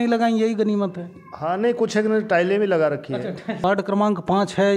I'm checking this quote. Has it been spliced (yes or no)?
yes